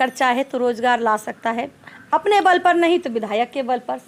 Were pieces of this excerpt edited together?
no; 0 cuts

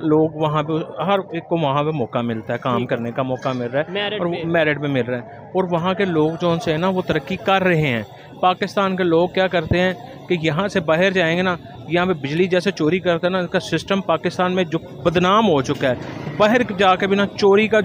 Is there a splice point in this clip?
no; 0 cuts

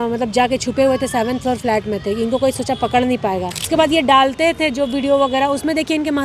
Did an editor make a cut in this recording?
yes; 1 cut; at 3.7 s

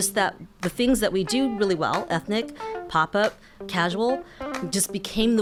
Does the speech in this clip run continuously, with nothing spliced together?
yes; 0 cuts

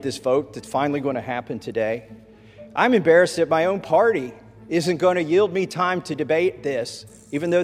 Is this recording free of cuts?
yes; 0 cuts

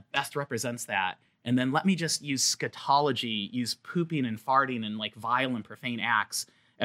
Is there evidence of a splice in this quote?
no; 0 cuts

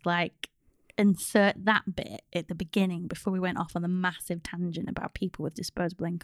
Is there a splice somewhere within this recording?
no; 0 cuts

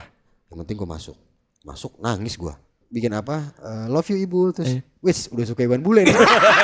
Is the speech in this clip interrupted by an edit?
yes; 1 cut; at 2.8 s

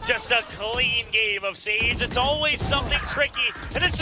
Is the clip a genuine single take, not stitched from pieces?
yes; 0 cuts

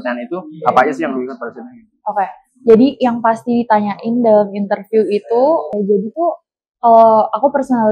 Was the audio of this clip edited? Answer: yes; 1 cut; at 5.7 s

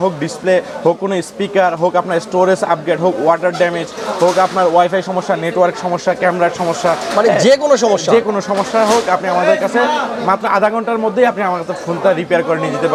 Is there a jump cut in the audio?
no; 0 cuts

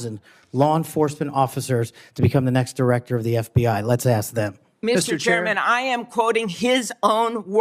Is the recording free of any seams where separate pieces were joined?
yes; 0 cuts

